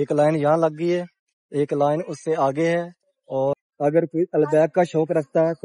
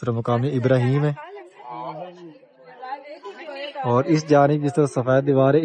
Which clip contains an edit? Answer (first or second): first